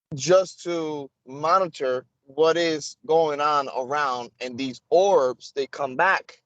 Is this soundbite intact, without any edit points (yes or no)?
yes